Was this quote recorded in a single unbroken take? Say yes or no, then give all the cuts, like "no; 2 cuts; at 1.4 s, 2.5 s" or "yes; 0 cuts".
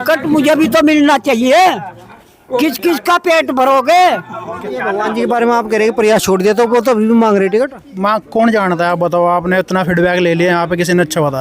no; 1 cut; at 4.9 s